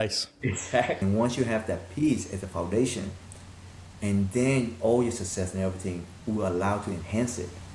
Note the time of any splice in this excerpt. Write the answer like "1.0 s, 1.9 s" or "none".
1.0 s